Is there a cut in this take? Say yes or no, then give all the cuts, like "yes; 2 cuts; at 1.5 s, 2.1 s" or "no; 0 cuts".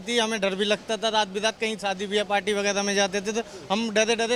no; 0 cuts